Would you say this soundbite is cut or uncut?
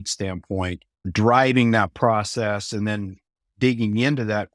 cut